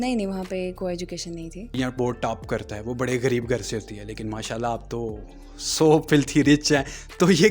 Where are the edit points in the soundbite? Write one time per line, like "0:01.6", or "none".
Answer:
0:01.8